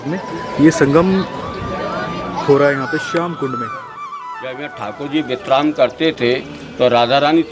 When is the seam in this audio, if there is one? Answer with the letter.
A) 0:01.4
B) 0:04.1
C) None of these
B